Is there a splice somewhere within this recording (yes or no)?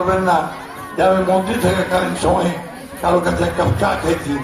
no